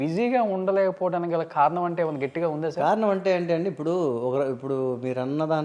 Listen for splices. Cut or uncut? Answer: uncut